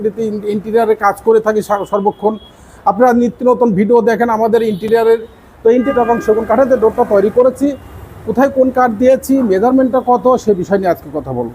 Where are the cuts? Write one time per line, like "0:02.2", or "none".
0:05.9